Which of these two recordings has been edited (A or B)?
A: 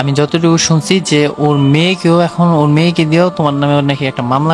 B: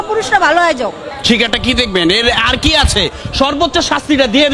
B